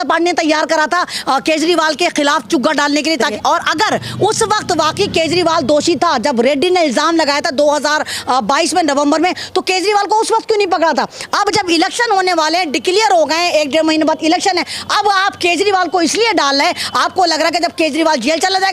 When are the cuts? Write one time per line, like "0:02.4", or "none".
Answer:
0:03.3